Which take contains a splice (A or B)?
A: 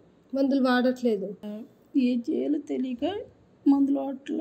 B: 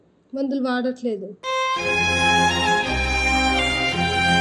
B